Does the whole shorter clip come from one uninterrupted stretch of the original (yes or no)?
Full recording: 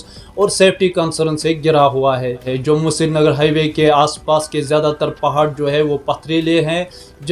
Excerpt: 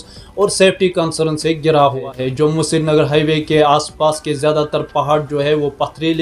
no